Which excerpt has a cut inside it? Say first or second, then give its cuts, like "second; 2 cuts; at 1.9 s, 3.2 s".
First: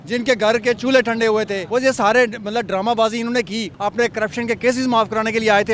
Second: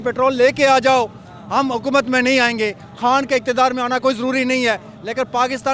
first; 2 cuts; at 1.6 s, 3.7 s